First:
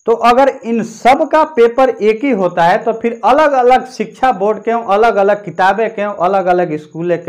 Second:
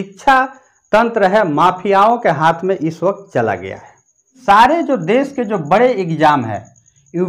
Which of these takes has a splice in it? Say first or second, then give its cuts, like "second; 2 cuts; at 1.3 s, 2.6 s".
second; 1 cut; at 4.4 s